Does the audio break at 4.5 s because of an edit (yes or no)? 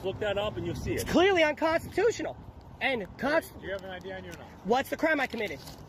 no